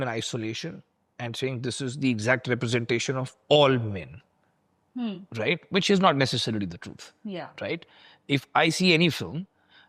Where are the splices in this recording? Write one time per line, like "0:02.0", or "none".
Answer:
none